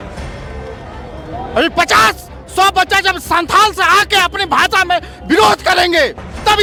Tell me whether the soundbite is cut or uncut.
uncut